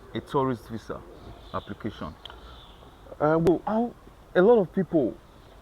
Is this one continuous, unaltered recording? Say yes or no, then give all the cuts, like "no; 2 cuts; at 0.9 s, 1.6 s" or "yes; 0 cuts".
no; 1 cut; at 3.5 s